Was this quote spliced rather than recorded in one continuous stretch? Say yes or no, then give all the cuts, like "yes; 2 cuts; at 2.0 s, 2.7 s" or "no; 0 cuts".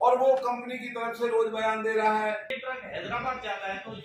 yes; 1 cut; at 2.5 s